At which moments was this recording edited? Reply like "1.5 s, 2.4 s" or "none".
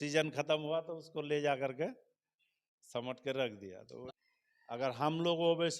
4.0 s